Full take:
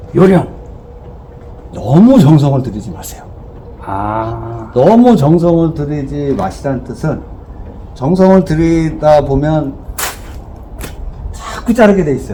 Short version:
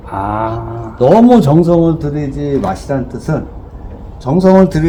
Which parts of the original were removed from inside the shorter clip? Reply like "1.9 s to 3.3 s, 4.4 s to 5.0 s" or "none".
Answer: none